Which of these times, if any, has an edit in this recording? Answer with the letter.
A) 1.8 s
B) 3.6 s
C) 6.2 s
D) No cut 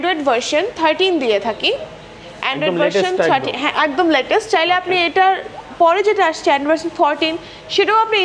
D